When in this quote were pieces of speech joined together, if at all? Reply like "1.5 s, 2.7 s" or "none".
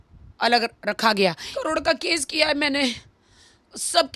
1.5 s